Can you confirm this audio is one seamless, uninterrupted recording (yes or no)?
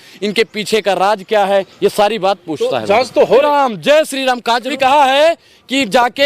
no